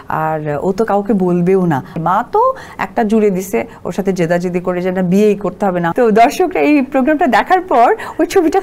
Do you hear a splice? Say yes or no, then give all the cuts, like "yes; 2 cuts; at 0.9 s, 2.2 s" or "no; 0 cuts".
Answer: yes; 2 cuts; at 1.9 s, 5.9 s